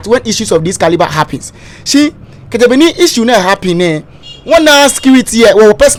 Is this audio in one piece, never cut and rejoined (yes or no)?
yes